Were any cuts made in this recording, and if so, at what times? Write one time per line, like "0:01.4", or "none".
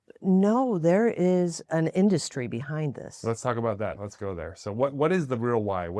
0:01.6
0:04.0